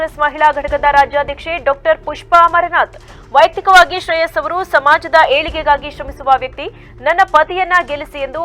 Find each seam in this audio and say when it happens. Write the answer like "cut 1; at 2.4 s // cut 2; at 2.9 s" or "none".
none

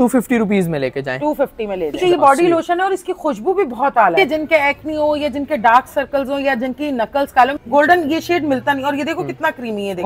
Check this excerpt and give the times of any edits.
cut 1; at 2.0 s // cut 2; at 4.1 s // cut 3; at 7.6 s

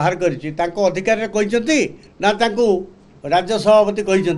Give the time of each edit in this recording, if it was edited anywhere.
cut 1; at 2.0 s

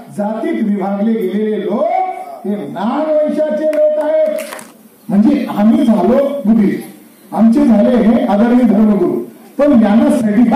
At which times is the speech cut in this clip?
cut 1; at 4.6 s

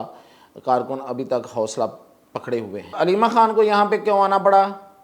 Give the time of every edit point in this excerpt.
cut 1; at 2.9 s

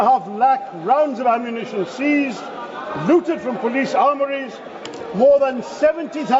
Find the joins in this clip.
none

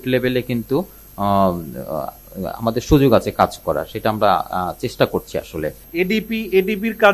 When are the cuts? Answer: none

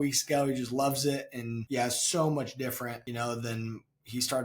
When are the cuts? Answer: cut 1; at 1.5 s // cut 2; at 3.0 s

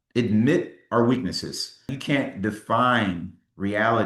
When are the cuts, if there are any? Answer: cut 1; at 1.9 s

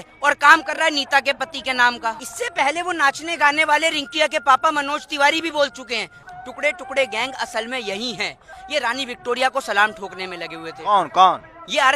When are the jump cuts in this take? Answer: cut 1; at 2.3 s // cut 2; at 6.2 s // cut 3; at 8.6 s

